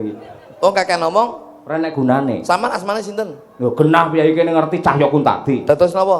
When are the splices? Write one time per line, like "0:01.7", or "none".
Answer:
none